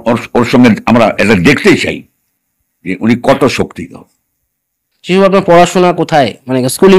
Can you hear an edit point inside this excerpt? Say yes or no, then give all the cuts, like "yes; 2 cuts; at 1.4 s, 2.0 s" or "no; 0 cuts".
yes; 1 cut; at 4.9 s